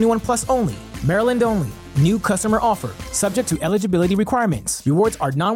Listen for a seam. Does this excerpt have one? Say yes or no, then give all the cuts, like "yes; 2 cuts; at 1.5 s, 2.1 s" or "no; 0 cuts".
no; 0 cuts